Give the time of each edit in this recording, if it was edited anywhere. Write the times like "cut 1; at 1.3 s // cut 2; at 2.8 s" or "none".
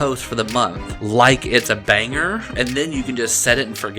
cut 1; at 0.9 s // cut 2; at 2.6 s